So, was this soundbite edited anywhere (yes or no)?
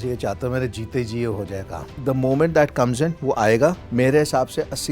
yes